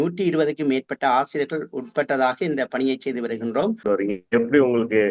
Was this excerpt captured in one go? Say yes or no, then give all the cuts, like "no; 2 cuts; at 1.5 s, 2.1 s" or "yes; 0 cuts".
no; 1 cut; at 3.8 s